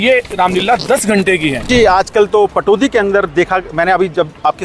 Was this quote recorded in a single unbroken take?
no; 1 cut; at 1.7 s

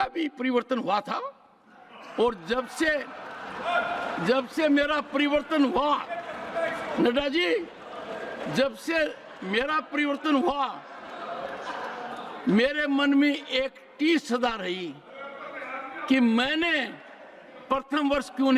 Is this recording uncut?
yes; 0 cuts

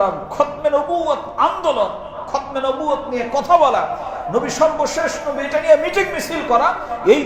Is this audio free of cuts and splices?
yes; 0 cuts

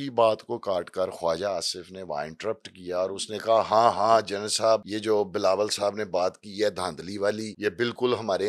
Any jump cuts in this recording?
yes; 2 cuts; at 4.9 s, 7.5 s

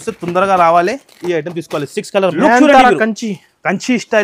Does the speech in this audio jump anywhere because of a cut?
yes; 1 cut; at 2.3 s

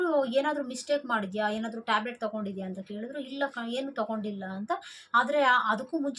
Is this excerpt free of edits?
yes; 0 cuts

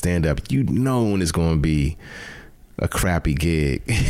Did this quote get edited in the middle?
no; 0 cuts

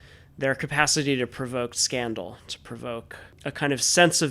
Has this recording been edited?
yes; 1 cut; at 3.4 s

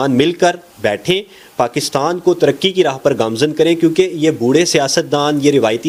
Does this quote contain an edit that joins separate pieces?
no; 0 cuts

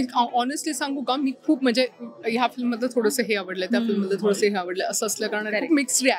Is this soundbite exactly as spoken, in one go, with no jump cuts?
yes; 0 cuts

